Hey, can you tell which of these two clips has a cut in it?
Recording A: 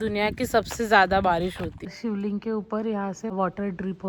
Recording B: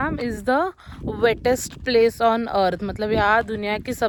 A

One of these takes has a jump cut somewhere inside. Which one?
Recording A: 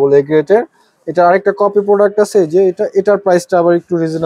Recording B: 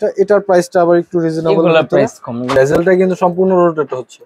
B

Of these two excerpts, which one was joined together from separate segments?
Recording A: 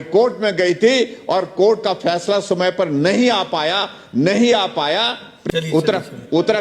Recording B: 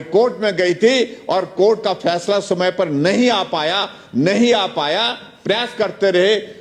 A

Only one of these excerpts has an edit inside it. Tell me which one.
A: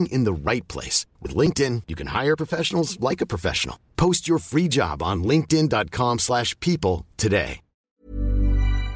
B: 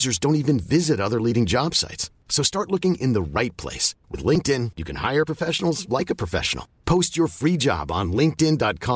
A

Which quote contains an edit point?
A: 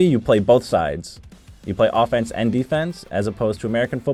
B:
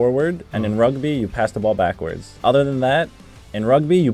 B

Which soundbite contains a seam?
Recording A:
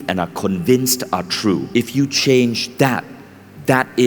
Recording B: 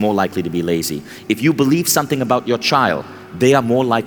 A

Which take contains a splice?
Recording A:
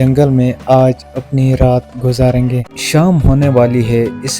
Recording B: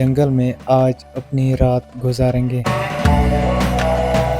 A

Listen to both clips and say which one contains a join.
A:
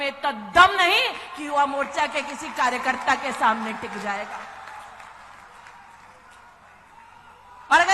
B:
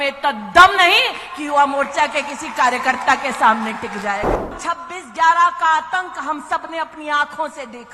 B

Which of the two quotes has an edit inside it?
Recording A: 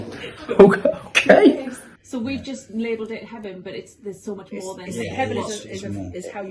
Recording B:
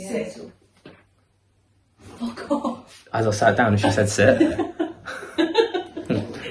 A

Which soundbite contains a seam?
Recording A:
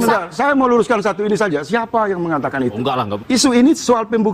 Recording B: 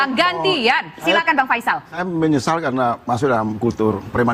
A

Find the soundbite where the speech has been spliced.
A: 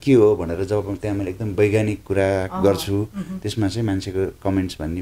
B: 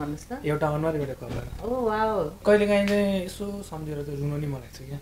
B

